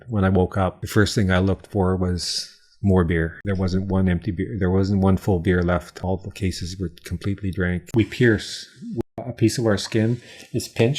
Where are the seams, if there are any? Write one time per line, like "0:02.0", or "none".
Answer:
0:00.8
0:03.4
0:05.9
0:07.9
0:09.2